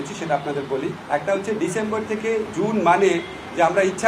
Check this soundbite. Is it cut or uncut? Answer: cut